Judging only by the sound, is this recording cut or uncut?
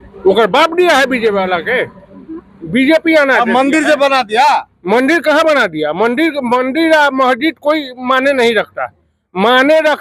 uncut